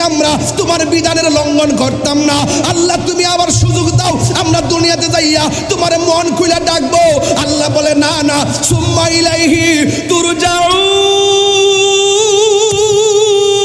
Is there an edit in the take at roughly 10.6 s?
no; 0 cuts

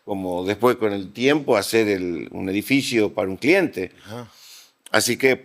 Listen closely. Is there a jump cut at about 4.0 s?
no; 0 cuts

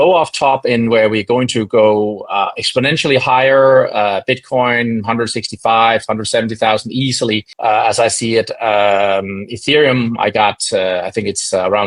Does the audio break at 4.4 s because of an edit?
no; 1 cut; at 7.5 s

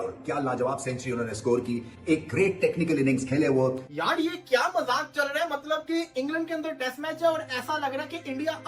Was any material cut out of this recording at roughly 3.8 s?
yes; 1 cut; at 3.8 s

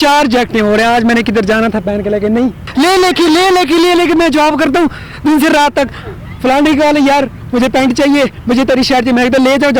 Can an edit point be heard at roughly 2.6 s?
yes; 1 cut; at 2.6 s

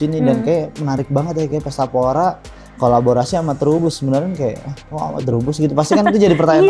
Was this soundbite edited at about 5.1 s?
no; 0 cuts

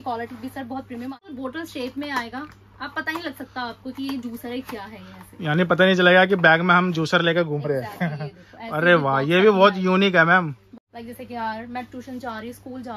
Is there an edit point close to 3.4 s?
no; 2 cuts; at 1.2 s, 10.6 s

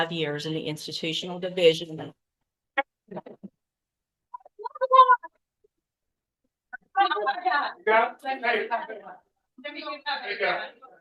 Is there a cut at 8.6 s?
no; 0 cuts

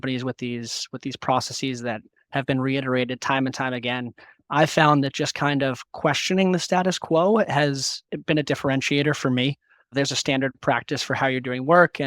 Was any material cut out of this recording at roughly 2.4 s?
no; 2 cuts; at 8.1 s, 9.9 s

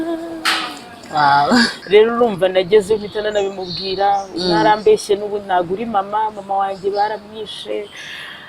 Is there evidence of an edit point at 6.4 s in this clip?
no; 1 cut; at 1.8 s

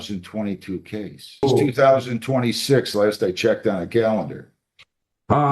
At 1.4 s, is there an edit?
yes; 1 cut; at 1.4 s

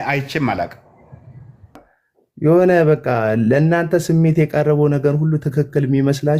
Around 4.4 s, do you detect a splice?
no; 1 cut; at 1.8 s

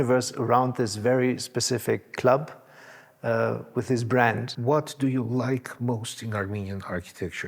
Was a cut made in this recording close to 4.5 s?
yes; 1 cut; at 4.5 s

